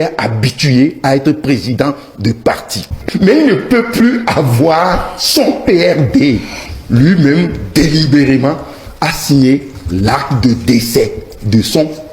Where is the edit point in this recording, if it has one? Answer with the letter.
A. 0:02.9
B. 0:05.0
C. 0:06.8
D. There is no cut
A